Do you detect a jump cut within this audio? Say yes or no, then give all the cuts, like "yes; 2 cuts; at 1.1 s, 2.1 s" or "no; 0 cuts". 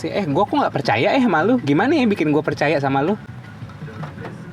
no; 0 cuts